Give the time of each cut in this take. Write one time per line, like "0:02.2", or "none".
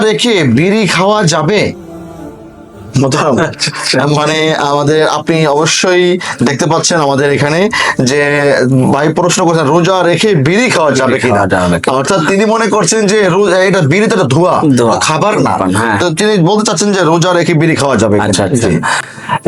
none